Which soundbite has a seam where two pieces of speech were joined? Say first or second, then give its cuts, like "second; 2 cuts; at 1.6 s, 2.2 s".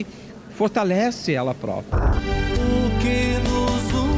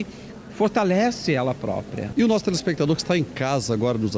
first; 1 cut; at 2.0 s